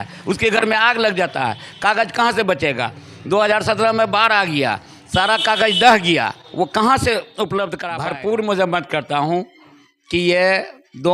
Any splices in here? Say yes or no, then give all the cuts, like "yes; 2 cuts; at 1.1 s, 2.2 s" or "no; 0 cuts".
yes; 1 cut; at 7.9 s